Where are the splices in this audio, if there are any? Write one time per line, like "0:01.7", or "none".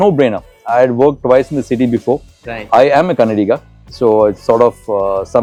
none

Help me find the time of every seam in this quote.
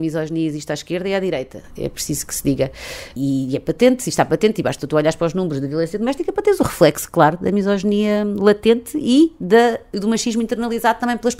0:03.1

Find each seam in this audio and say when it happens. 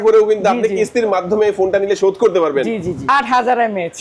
0:03.0

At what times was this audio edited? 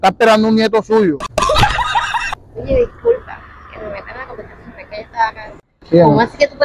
0:01.3

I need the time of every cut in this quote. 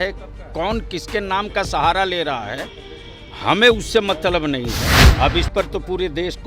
0:05.0

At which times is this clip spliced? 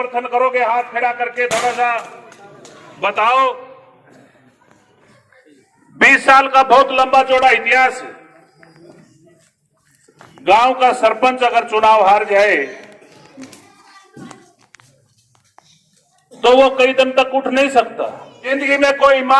0:05.0
0:18.5

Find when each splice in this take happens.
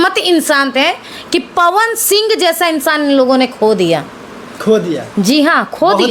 none

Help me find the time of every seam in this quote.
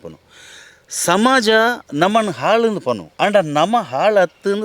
0:01.8
0:03.1

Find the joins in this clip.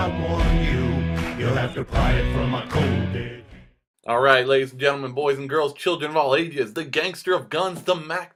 none

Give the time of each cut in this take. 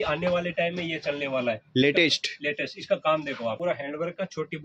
0:03.6

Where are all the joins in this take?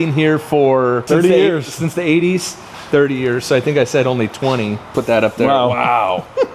0:01.0
0:04.8

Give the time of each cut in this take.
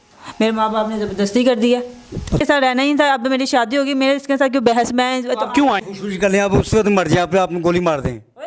0:02.4
0:05.8

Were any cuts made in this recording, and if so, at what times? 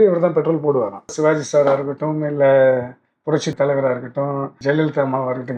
0:01.1
0:03.5
0:04.5

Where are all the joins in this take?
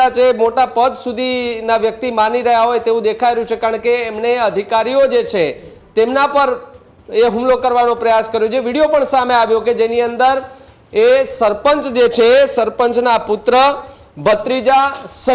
none

